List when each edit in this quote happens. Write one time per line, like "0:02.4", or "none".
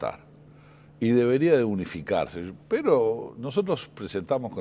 0:03.7